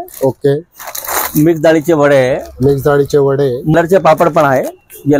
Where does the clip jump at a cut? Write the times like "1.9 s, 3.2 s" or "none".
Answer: 3.7 s